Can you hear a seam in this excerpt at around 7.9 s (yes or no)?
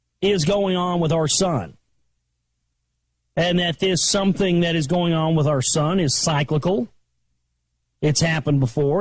no